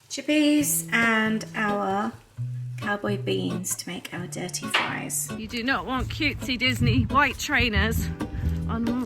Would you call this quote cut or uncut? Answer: cut